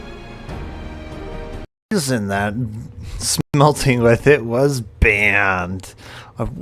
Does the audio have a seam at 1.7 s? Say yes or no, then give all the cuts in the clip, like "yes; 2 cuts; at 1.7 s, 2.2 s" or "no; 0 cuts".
yes; 2 cuts; at 1.7 s, 3.5 s